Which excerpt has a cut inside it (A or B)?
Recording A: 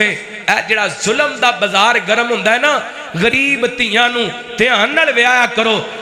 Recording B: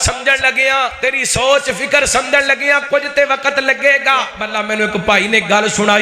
B